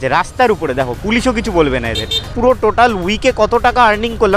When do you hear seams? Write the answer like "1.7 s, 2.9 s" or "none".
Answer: 2.3 s

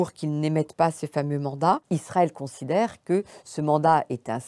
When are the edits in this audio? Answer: 1.8 s

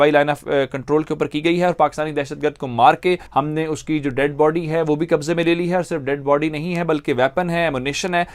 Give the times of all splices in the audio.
none

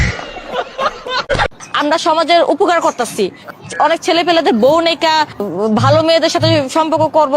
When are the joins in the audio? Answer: 1.4 s

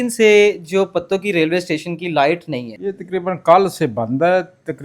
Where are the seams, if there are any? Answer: 2.7 s

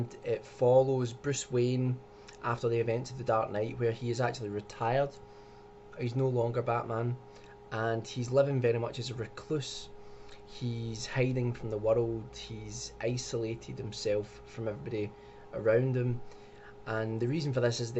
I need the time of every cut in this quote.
6.1 s

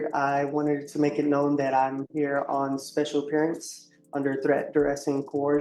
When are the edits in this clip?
none

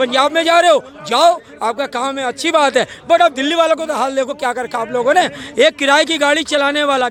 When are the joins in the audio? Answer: none

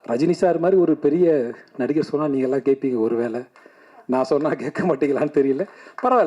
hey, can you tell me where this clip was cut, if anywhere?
none

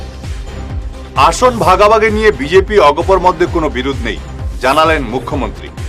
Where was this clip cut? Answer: 0.9 s

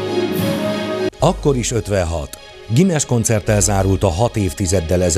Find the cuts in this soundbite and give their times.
1.1 s

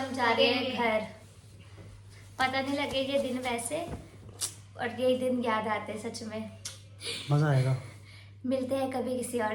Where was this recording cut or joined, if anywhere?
none

